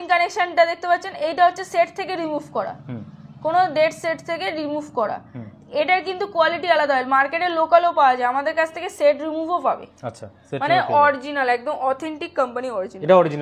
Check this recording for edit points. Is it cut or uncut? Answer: uncut